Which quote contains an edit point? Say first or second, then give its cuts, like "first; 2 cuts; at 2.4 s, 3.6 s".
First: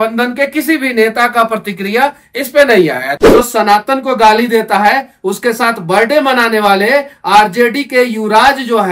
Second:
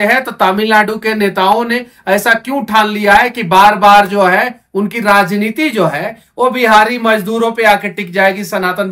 first; 1 cut; at 3.1 s